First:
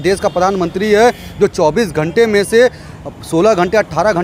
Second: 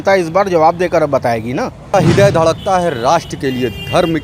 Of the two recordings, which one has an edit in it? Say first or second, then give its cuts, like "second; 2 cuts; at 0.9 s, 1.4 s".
second; 1 cut; at 1.9 s